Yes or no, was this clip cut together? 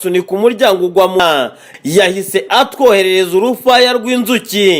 yes